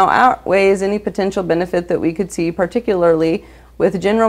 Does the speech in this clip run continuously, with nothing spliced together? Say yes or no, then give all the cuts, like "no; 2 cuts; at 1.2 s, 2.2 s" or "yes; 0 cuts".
yes; 0 cuts